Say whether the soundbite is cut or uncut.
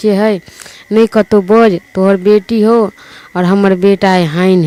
uncut